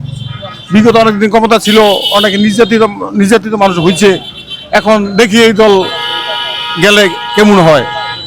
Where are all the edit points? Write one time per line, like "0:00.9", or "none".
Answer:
none